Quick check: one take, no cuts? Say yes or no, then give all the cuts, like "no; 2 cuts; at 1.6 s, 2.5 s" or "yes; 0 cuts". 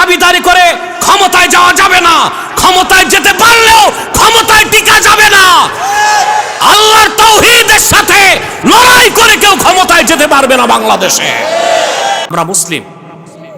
yes; 0 cuts